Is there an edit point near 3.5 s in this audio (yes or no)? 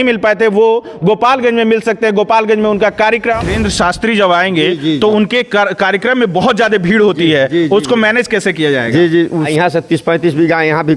yes